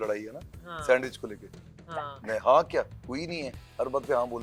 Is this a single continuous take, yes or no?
yes